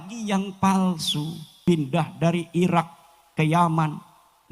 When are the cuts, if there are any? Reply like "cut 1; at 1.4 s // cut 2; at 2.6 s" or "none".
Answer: cut 1; at 1.5 s